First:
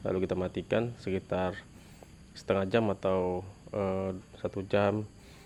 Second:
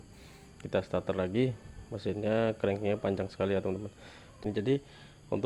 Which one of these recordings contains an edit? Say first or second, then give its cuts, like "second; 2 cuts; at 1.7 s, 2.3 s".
second; 1 cut; at 4.4 s